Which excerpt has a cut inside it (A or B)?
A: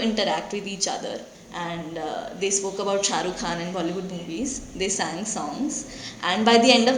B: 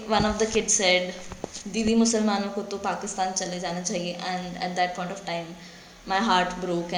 A